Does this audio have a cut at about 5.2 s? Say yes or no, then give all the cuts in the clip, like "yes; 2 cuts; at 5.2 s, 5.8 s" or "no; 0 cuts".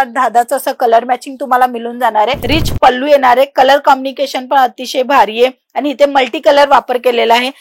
no; 1 cut; at 2.4 s